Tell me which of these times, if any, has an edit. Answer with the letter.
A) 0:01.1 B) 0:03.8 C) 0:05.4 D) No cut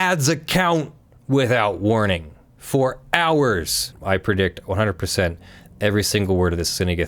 B